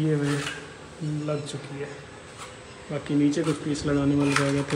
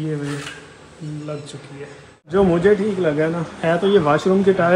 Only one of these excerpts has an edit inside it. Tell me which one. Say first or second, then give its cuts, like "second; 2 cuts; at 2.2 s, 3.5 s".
second; 1 cut; at 2.3 s